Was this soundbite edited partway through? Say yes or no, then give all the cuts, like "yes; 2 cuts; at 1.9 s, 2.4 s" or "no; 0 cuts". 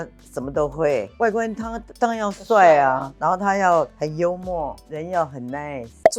yes; 1 cut; at 1.1 s